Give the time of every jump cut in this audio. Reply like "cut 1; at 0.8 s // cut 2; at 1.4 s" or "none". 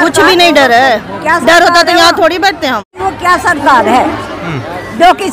cut 1; at 3.0 s